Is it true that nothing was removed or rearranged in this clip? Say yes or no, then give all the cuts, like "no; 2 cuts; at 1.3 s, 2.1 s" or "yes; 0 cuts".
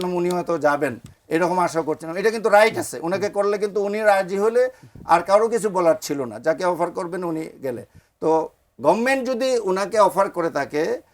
yes; 0 cuts